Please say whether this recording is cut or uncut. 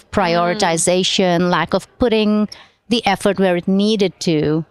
uncut